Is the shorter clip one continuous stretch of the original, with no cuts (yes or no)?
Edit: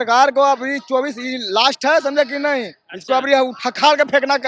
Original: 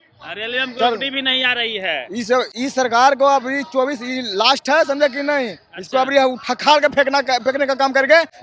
yes